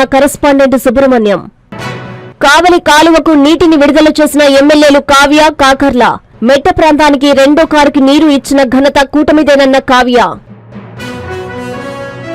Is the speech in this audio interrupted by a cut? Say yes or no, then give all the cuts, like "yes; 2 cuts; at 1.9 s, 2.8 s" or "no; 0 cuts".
yes; 1 cut; at 10.4 s